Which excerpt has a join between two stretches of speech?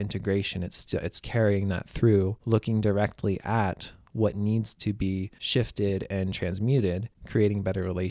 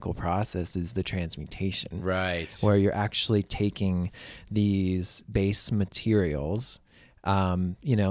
first; 3 cuts; at 2.4 s, 5.4 s, 7.1 s

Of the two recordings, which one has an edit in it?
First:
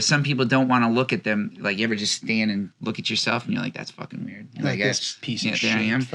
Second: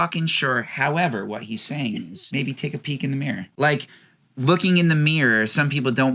second; 2 cuts; at 2.2 s, 3.4 s

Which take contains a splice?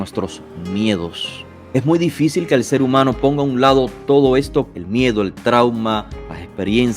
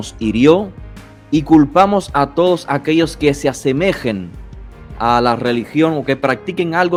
first; 2 cuts; at 1.7 s, 4.7 s

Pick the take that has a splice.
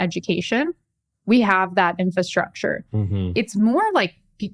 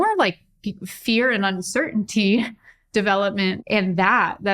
second; 1 cut; at 3.6 s

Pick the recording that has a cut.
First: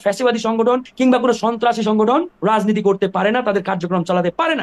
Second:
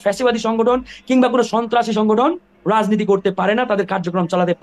first; 2 cuts; at 0.9 s, 2.3 s

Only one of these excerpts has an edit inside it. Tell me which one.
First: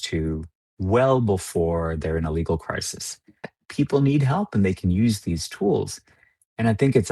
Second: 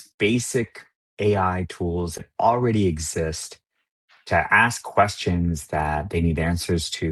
first; 1 cut; at 3.6 s

